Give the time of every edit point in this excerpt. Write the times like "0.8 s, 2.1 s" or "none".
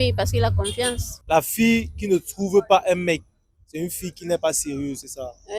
1.1 s